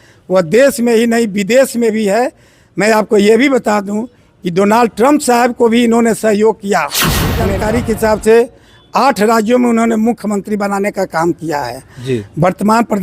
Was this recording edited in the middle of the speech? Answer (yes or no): yes